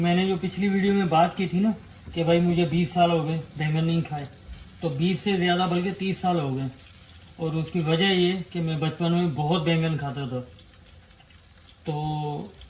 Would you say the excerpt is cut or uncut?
uncut